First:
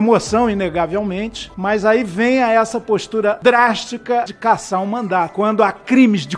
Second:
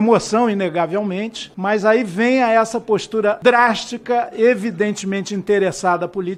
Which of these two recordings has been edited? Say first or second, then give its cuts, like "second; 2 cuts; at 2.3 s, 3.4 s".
first; 1 cut; at 4.3 s